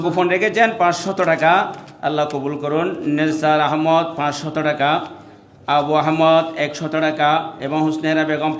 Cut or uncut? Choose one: uncut